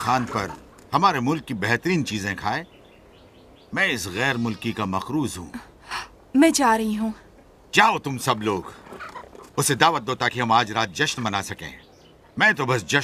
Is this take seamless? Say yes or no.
no